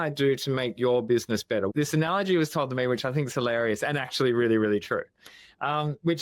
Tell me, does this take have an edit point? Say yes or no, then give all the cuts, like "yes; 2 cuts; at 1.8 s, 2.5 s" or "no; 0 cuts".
yes; 1 cut; at 1.7 s